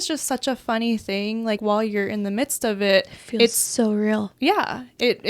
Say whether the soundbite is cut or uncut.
cut